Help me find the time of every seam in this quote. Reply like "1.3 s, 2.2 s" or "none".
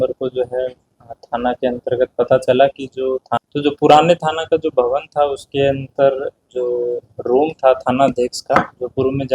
3.3 s

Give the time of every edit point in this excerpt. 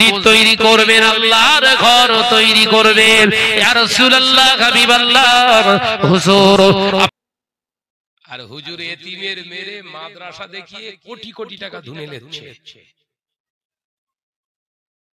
7.1 s

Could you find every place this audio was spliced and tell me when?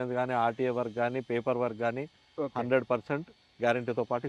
none

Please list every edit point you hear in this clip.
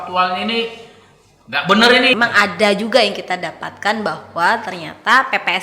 2.2 s

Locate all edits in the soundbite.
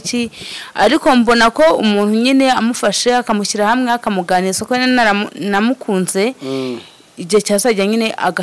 none

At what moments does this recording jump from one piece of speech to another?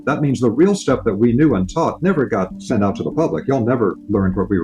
2.6 s

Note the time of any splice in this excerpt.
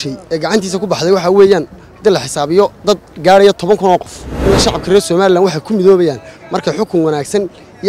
4.5 s

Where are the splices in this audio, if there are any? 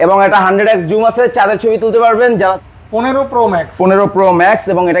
2.6 s

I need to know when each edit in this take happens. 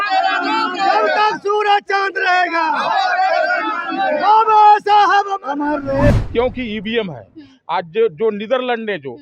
6.1 s

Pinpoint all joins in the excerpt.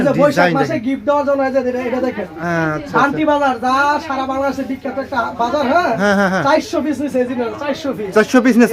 none

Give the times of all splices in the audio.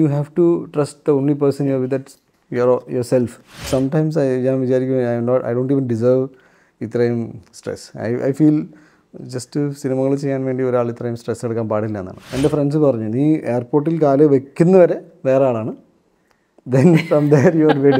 3.6 s, 12.2 s

